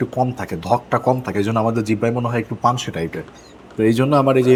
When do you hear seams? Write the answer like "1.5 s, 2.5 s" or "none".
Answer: none